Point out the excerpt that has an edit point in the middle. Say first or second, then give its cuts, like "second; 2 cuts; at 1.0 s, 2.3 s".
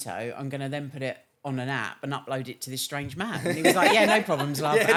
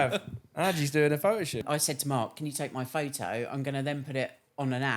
second; 1 cut; at 1.6 s